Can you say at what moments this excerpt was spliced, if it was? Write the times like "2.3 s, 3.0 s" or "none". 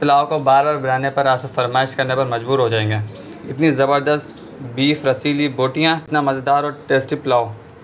6.6 s